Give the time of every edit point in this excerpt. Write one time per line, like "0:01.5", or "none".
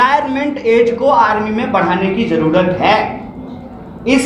none